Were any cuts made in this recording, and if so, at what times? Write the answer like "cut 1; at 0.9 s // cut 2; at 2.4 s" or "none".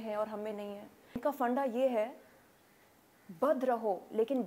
cut 1; at 1.2 s